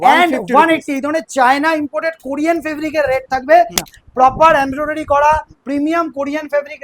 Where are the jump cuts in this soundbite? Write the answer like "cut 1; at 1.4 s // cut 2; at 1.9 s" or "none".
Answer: cut 1; at 3.8 s